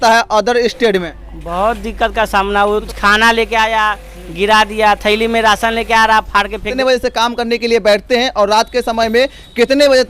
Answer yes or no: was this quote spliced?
yes